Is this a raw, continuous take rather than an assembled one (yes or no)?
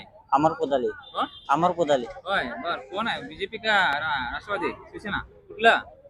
yes